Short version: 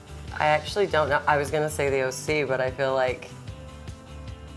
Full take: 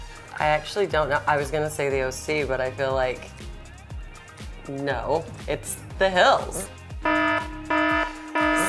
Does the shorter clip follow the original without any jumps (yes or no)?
yes